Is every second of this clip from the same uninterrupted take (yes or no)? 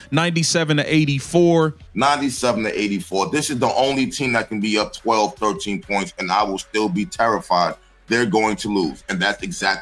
no